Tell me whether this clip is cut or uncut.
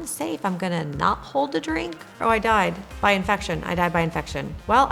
cut